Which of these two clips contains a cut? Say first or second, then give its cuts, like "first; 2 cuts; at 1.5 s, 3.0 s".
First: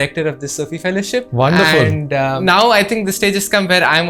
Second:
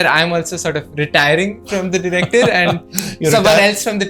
first; 2 cuts; at 1.3 s, 2.4 s